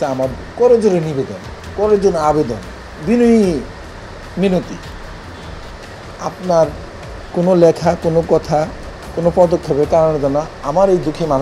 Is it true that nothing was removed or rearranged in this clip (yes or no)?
yes